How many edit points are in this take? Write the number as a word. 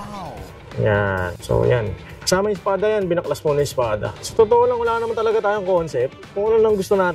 one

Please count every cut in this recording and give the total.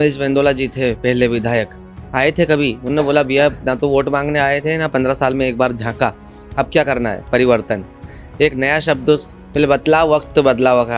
zero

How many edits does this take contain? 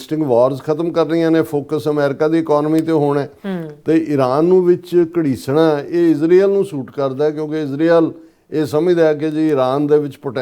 zero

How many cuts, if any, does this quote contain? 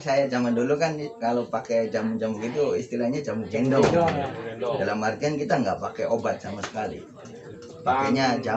zero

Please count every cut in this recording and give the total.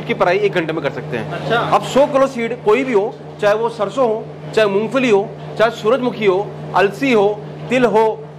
zero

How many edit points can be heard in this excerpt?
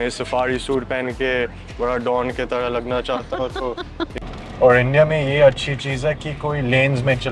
one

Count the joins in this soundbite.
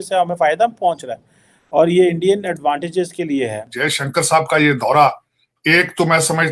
one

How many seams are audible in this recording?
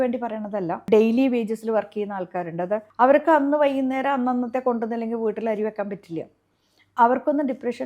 two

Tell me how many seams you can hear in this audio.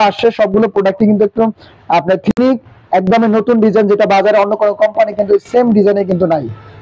one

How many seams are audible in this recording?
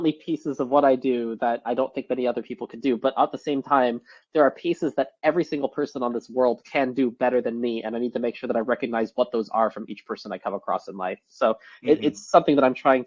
zero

